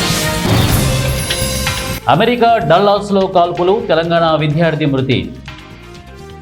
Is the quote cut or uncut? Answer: cut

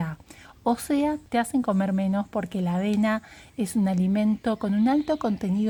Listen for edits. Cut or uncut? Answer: uncut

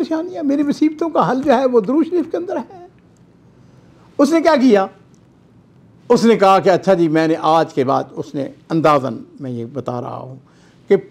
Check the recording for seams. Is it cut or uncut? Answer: uncut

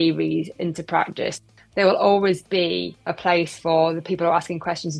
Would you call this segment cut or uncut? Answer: cut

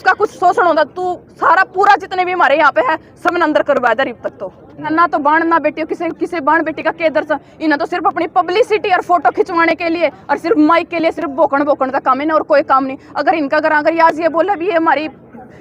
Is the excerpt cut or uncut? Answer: cut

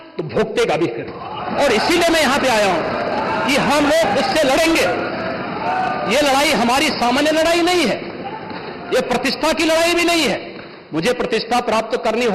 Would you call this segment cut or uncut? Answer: uncut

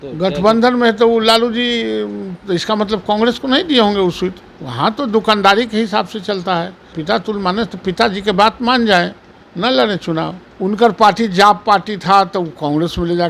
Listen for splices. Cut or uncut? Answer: cut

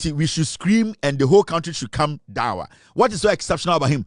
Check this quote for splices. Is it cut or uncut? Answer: uncut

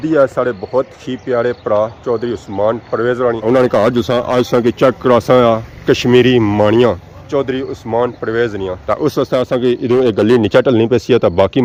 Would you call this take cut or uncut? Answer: uncut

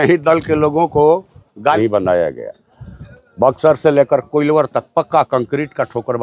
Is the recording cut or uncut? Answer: cut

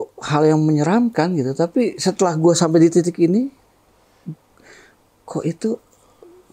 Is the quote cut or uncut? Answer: uncut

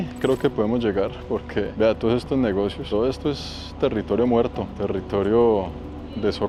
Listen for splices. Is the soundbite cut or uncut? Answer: uncut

